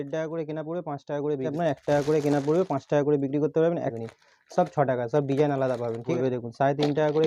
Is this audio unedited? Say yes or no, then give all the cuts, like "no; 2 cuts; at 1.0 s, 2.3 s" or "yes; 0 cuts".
no; 3 cuts; at 1.5 s, 3.9 s, 6.1 s